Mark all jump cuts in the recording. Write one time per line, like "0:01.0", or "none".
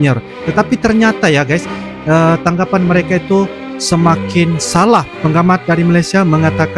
0:05.1